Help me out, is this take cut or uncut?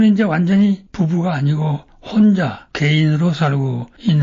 uncut